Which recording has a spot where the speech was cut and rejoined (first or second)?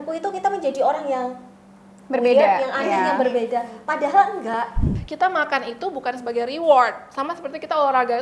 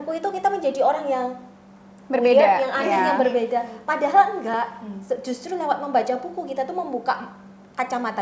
first